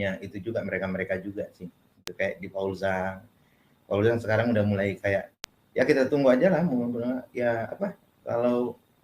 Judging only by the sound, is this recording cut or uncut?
cut